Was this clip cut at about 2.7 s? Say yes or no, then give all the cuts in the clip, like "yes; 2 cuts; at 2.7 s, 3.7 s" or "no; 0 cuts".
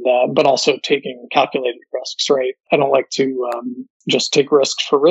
yes; 1 cut; at 2.7 s